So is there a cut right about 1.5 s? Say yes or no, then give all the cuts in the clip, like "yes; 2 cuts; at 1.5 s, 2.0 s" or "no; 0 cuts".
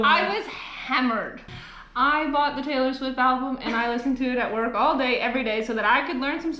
yes; 1 cut; at 1.5 s